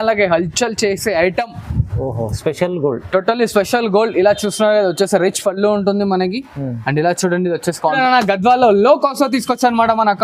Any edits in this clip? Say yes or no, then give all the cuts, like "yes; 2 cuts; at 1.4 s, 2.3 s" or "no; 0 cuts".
yes; 1 cut; at 8.0 s